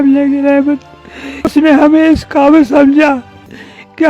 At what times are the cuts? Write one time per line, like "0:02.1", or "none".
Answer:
0:01.5